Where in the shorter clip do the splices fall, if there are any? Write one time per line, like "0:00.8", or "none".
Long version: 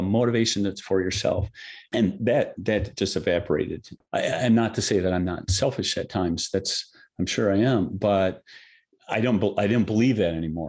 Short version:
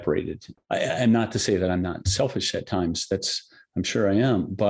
none